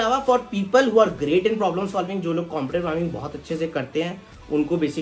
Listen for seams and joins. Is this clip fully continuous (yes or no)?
yes